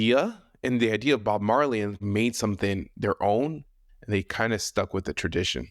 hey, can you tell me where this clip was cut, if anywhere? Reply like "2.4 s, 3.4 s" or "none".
2.0 s